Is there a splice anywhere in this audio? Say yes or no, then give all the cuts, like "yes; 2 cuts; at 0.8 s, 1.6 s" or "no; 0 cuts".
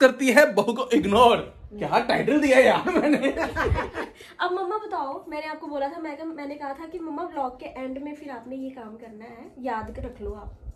no; 0 cuts